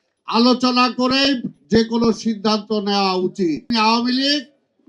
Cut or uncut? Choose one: cut